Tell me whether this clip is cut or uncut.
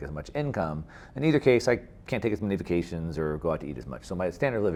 uncut